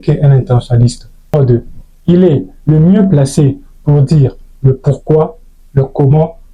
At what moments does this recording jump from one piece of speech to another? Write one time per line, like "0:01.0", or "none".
0:01.3